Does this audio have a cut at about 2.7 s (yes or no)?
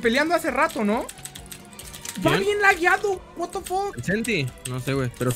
no